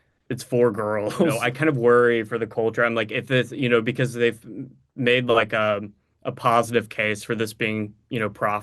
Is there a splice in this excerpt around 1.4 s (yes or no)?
yes